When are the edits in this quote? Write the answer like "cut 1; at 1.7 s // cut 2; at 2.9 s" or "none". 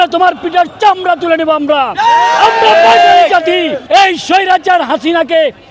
cut 1; at 3.8 s